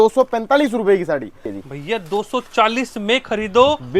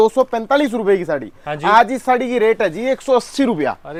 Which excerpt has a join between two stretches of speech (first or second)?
first